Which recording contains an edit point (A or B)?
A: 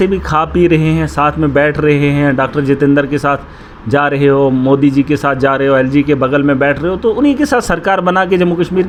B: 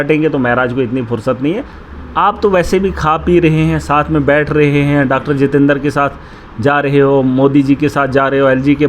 B